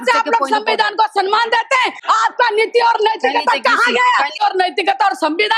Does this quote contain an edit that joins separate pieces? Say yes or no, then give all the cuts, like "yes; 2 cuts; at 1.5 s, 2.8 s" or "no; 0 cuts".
yes; 2 cuts; at 2.0 s, 4.4 s